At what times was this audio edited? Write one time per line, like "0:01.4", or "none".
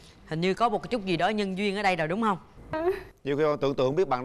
0:02.7